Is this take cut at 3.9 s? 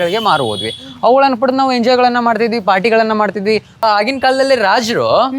yes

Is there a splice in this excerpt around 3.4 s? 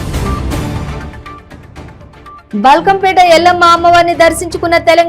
no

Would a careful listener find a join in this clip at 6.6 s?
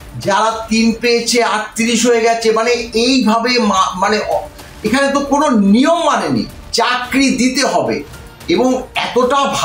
yes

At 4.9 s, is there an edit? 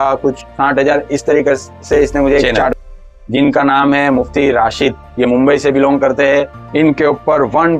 no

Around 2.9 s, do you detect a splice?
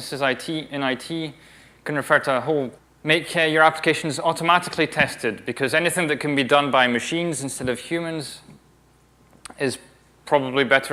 no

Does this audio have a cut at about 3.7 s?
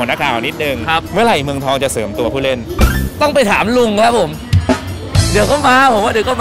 no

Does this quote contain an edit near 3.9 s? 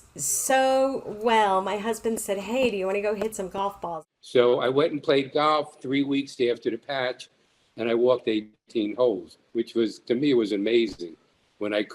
yes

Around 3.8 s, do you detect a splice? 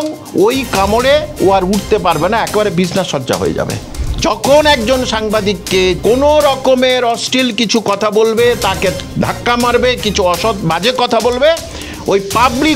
yes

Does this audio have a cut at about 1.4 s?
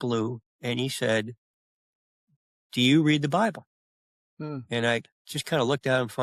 no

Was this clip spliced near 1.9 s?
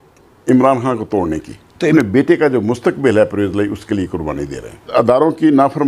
yes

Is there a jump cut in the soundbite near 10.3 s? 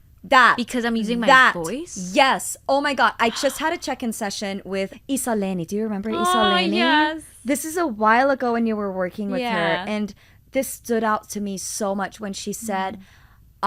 no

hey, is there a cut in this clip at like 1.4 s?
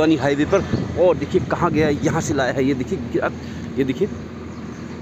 no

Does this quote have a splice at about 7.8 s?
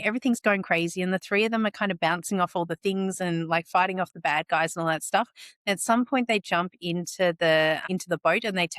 yes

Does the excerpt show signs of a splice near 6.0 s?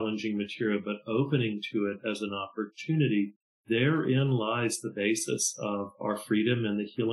yes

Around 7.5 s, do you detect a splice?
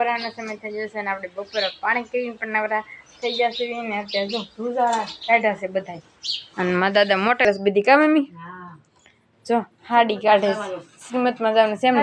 yes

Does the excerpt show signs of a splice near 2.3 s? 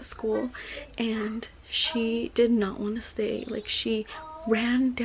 no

